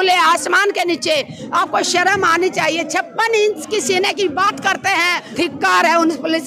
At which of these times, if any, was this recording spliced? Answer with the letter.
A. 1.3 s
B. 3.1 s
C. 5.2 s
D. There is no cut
C